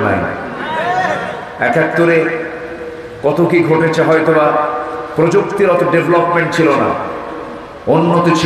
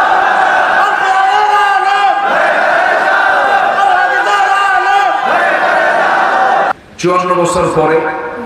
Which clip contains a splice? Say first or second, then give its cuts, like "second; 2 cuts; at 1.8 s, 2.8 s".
second; 1 cut; at 6.7 s